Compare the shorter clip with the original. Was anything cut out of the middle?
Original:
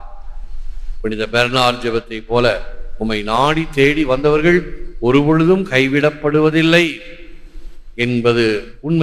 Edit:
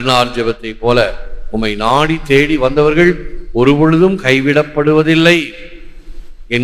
no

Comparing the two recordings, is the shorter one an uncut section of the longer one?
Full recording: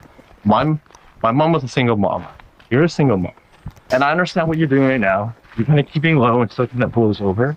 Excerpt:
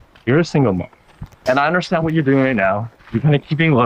yes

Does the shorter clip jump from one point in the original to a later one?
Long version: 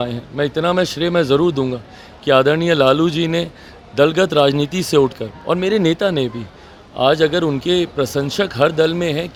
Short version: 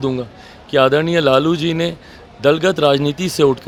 no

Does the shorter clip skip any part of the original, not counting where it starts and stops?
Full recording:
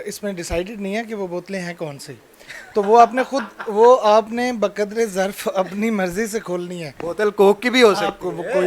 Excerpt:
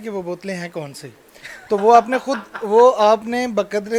no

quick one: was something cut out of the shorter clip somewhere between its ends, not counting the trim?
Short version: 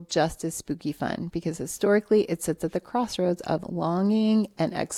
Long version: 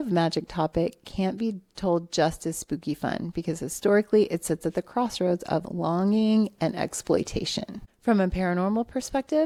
no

